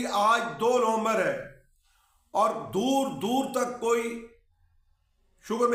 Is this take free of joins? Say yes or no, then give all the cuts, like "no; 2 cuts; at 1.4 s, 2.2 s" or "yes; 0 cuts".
yes; 0 cuts